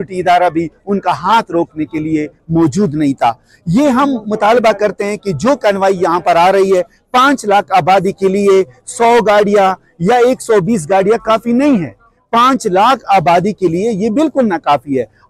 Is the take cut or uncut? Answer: uncut